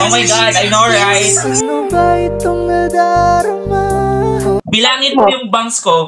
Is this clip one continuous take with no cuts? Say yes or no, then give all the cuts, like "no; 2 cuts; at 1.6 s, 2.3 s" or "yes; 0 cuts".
no; 1 cut; at 4.6 s